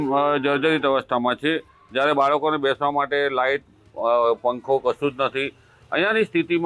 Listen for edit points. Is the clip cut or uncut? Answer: uncut